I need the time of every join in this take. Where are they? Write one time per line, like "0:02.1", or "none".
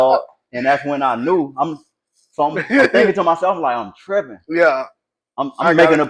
none